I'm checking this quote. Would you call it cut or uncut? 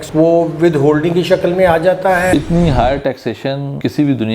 cut